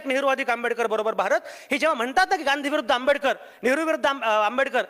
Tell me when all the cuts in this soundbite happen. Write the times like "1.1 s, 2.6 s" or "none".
none